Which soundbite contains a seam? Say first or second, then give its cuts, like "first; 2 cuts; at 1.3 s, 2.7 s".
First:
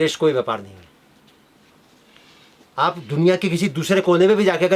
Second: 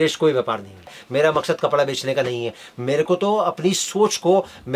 second; 1 cut; at 1.0 s